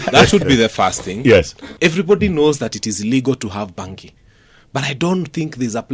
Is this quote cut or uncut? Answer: cut